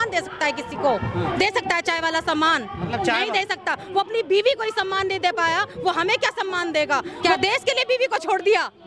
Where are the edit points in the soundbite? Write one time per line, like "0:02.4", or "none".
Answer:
0:07.3